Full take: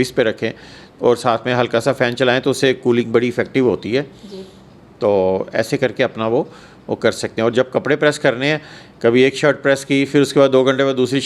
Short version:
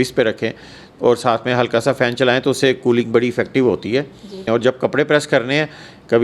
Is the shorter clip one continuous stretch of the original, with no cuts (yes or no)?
no